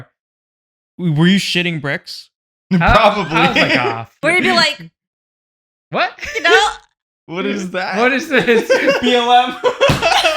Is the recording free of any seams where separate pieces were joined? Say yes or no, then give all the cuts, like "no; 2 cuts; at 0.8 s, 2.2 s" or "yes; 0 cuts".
no; 1 cut; at 4.2 s